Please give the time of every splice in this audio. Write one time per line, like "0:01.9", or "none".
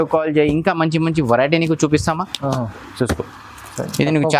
none